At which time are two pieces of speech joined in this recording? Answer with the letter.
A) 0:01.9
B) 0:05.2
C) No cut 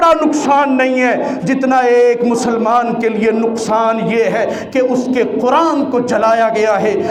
C